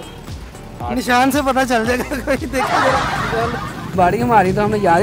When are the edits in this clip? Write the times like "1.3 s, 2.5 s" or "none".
3.9 s